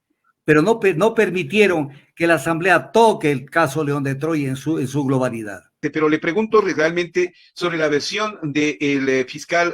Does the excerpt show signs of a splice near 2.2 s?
no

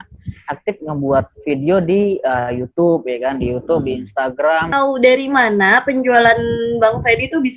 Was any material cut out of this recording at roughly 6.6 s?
no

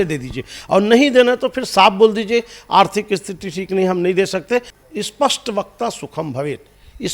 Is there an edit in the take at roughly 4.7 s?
yes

